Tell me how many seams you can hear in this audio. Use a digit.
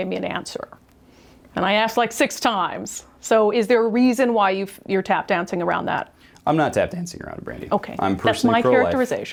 0